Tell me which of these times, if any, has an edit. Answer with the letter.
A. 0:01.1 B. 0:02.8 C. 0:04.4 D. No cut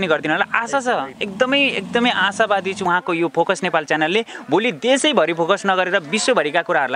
B